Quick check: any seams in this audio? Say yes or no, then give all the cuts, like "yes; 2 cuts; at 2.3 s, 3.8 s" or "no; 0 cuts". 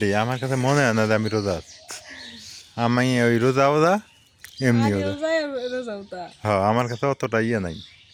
no; 0 cuts